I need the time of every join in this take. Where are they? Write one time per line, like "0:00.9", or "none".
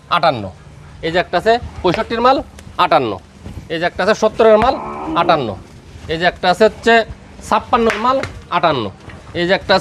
none